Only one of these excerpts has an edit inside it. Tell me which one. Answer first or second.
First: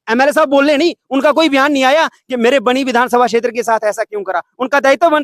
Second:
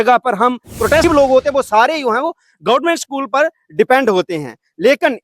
second